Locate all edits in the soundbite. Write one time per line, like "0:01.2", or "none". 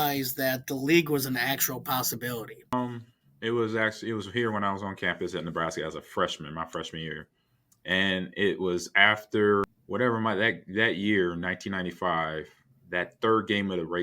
0:02.7
0:09.8

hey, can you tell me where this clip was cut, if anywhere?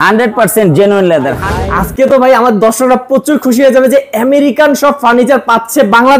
0:01.5

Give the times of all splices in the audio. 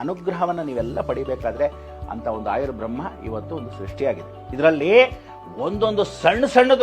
0:04.4

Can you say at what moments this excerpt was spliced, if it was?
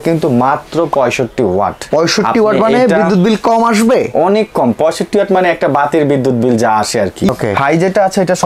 0:01.8
0:07.3

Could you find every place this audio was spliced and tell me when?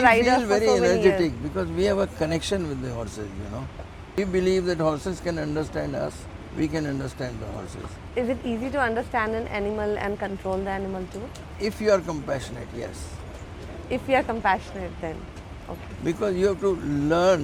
none

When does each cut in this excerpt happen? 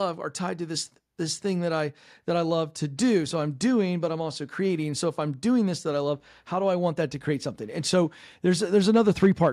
none

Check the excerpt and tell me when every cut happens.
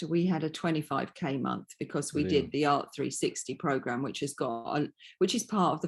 none

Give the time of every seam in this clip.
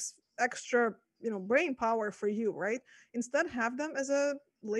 none

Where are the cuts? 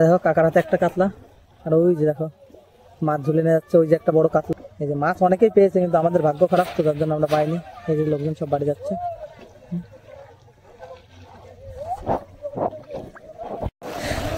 none

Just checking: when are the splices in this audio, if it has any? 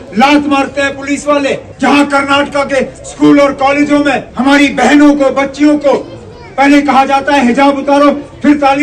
0:01.7
0:04.3

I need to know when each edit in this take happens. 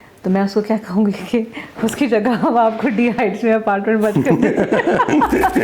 none

